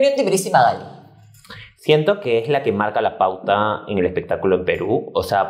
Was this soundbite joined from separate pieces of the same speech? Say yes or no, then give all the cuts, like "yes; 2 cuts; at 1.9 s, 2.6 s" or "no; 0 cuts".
no; 0 cuts